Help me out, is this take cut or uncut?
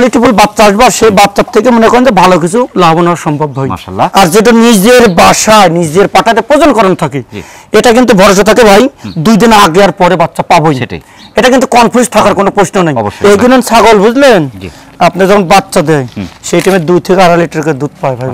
cut